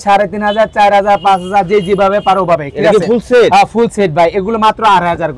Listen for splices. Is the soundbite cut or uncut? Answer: uncut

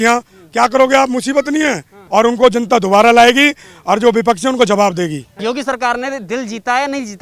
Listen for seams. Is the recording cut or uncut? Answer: cut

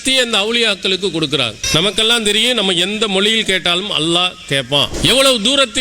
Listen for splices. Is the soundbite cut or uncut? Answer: cut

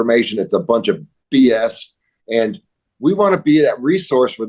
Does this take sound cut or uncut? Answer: cut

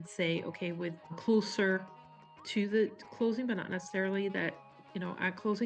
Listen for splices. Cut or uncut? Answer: cut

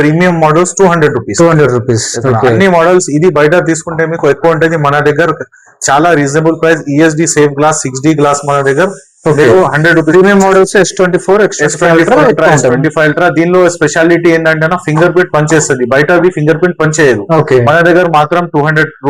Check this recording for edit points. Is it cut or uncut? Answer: uncut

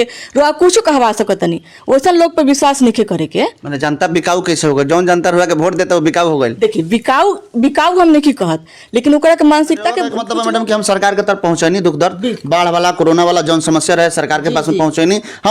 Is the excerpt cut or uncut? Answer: cut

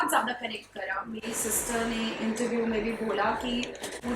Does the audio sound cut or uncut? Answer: uncut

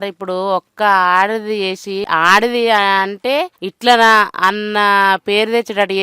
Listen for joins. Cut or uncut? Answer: cut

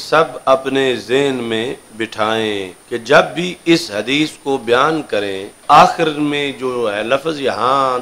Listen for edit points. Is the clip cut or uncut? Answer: cut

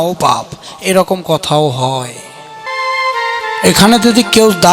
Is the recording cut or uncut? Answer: cut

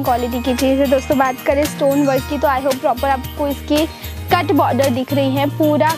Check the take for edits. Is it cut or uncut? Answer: uncut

